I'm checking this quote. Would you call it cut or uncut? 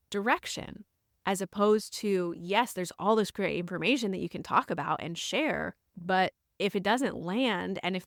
uncut